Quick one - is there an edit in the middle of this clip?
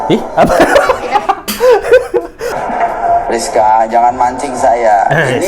yes; 1 cut; at 2.5 s

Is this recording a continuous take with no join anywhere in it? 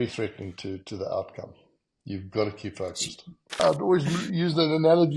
no; 1 cut; at 3.6 s

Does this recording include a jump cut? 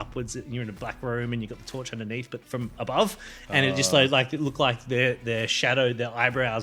no; 0 cuts

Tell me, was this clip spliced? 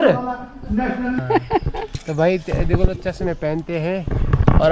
yes; 1 cut; at 1.2 s

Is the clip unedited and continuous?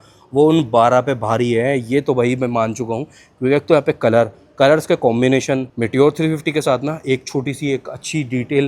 no; 1 cut; at 5.7 s

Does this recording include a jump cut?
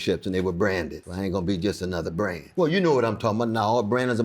yes; 2 cuts; at 1.0 s, 2.4 s

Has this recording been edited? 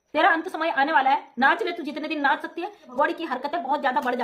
yes; 1 cut; at 2.9 s

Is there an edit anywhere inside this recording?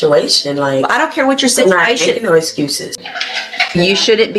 yes; 1 cut; at 3.0 s

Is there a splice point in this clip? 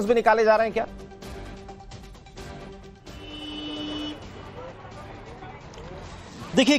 yes; 1 cut; at 2.0 s

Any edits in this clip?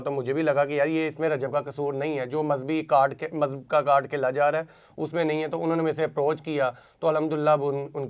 no; 0 cuts

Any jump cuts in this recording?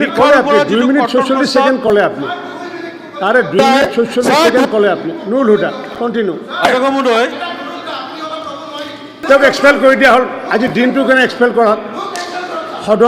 yes; 1 cut; at 9.1 s

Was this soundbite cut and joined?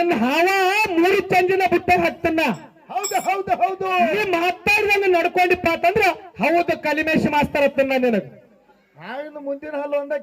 no; 0 cuts

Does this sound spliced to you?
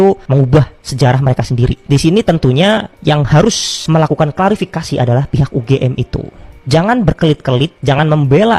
no; 0 cuts

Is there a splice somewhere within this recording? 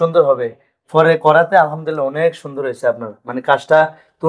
no; 0 cuts

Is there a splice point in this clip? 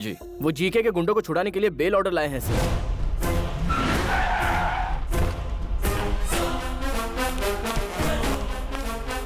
no; 0 cuts

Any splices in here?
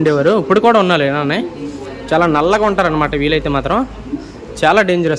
no; 0 cuts

